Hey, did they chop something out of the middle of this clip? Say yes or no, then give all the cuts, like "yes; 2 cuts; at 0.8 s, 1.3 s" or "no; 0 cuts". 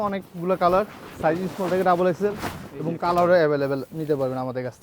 no; 0 cuts